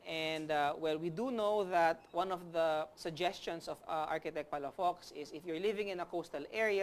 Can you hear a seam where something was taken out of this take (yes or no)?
yes